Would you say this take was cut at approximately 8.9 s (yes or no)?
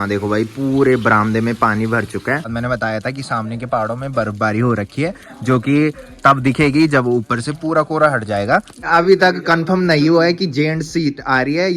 yes